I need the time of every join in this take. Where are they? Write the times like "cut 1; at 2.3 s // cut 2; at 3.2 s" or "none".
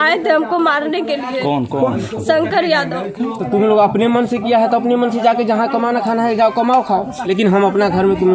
cut 1; at 3.4 s // cut 2; at 7.1 s